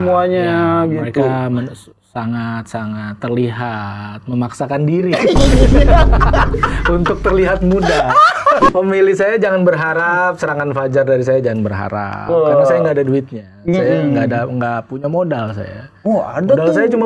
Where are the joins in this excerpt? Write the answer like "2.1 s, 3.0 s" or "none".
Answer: 8.7 s